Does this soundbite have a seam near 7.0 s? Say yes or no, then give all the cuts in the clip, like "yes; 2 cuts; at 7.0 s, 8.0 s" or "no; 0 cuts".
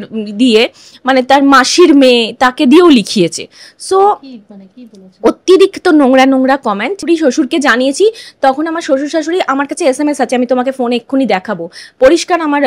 yes; 1 cut; at 7.0 s